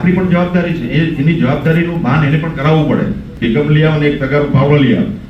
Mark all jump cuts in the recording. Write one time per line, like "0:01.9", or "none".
0:03.3